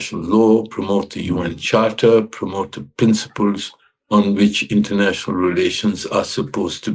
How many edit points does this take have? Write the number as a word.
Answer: zero